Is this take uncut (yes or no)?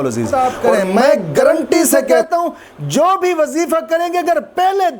no